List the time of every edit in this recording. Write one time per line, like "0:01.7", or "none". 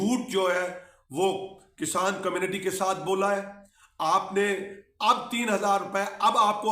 none